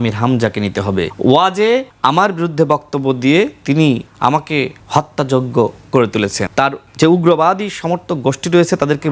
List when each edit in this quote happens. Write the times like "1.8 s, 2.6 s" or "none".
1.1 s, 1.9 s, 4.4 s, 6.6 s